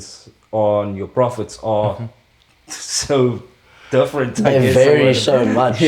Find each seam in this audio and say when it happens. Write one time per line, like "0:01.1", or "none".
none